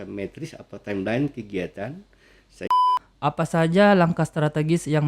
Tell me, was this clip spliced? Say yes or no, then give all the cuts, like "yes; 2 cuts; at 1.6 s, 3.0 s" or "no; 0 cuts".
yes; 1 cut; at 2.7 s